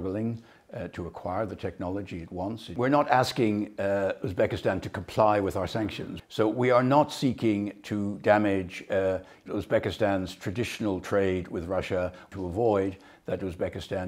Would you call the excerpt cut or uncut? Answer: cut